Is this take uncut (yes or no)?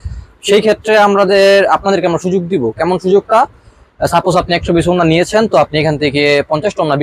yes